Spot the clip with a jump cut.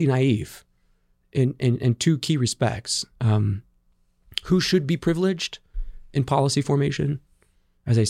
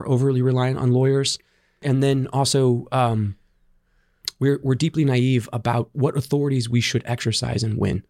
second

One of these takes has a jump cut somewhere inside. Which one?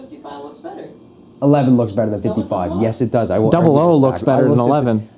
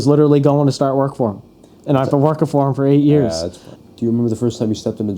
second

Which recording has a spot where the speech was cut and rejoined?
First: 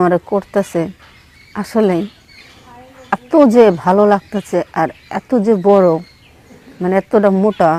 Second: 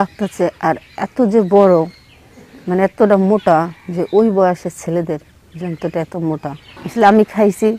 second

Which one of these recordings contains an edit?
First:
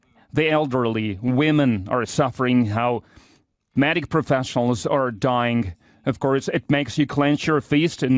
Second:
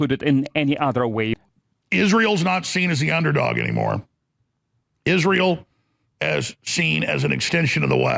second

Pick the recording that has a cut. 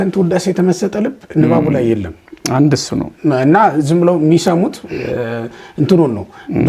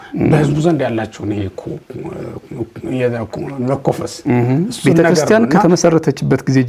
second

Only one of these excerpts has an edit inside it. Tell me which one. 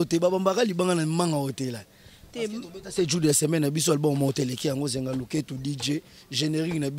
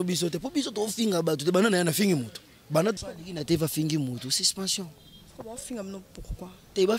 second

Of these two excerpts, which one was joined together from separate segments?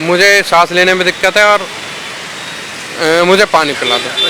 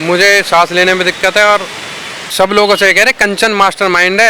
second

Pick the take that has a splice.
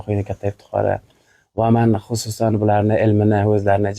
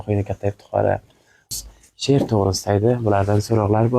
second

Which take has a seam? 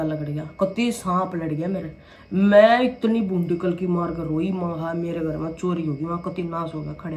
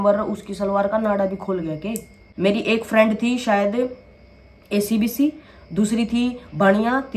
second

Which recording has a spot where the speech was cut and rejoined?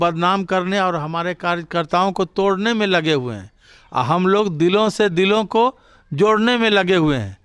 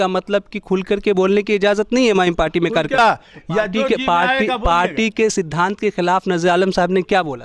second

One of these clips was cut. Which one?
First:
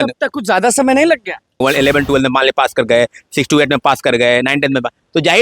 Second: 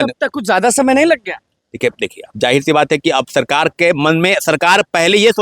first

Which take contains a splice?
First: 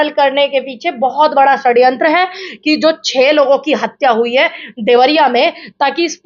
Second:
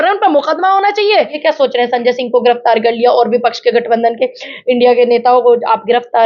second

